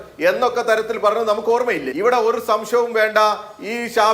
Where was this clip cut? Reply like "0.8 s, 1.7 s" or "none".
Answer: 1.9 s